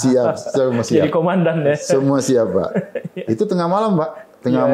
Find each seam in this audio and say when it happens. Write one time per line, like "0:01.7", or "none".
none